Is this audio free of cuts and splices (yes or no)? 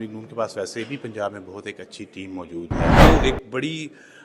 no